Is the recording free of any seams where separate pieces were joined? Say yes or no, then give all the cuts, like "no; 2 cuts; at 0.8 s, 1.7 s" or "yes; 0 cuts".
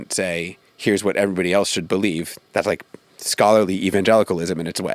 no; 1 cut; at 2.3 s